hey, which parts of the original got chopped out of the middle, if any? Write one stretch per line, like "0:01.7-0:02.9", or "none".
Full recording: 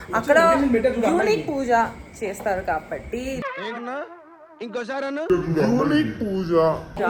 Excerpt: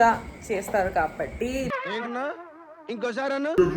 none